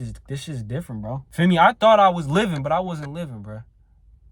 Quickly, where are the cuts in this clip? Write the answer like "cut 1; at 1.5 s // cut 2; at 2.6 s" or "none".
cut 1; at 1.2 s